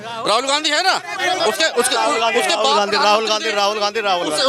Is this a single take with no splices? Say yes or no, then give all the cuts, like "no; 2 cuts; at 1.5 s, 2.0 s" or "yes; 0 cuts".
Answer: yes; 0 cuts